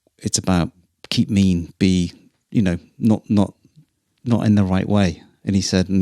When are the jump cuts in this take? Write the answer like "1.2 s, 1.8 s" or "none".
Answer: 0.9 s